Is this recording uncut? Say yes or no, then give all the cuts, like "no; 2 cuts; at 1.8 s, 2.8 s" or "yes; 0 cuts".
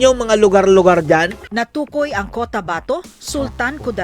no; 1 cut; at 1.4 s